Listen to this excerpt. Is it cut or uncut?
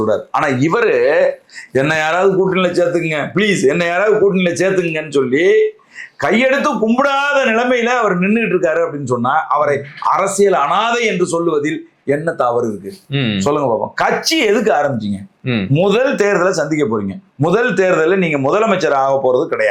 uncut